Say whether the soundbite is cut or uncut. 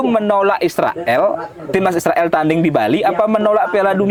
uncut